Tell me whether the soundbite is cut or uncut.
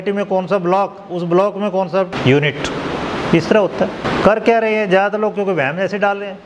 cut